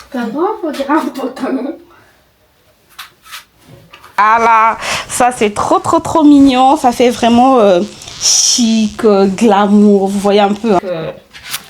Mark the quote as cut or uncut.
cut